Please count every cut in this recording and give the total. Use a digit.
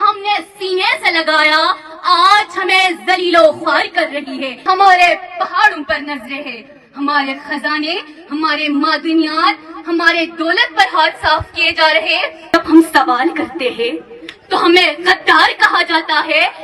2